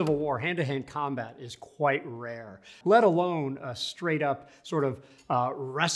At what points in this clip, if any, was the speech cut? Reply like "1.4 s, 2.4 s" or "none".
2.7 s